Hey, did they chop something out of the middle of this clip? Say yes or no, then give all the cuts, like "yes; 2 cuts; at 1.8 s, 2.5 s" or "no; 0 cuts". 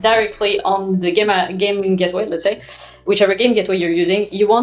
no; 0 cuts